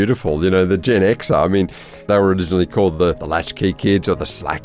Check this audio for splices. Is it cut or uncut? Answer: cut